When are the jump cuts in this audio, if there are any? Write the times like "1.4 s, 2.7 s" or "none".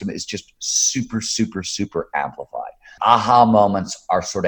2.9 s